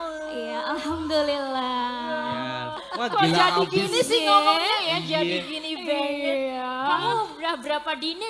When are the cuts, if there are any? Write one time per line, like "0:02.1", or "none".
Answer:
0:02.8